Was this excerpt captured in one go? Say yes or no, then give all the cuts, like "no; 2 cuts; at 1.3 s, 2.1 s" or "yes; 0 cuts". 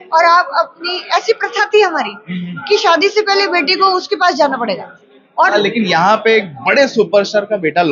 no; 1 cut; at 5.5 s